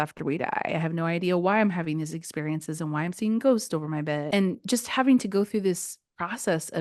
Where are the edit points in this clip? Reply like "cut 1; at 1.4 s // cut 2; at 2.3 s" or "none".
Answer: cut 1; at 4.2 s